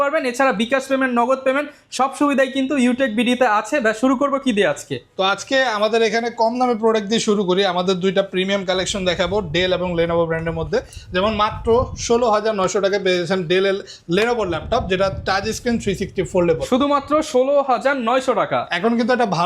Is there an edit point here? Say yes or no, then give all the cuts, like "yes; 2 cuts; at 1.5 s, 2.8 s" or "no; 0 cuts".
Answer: no; 0 cuts